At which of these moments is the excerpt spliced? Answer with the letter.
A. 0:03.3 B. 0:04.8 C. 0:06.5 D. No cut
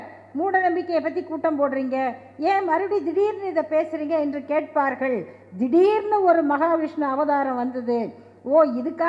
D